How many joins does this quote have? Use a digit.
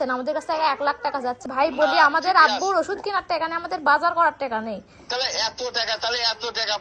1